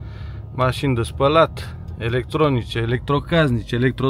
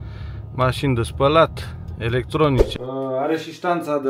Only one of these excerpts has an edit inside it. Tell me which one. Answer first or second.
second